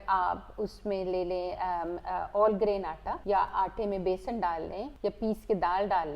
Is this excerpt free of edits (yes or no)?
no